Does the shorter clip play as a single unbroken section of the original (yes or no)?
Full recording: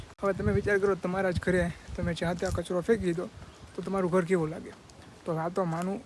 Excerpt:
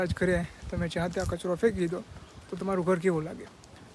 yes